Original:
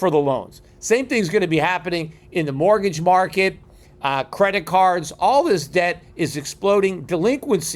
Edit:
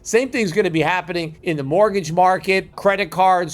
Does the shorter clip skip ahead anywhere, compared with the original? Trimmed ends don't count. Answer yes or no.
yes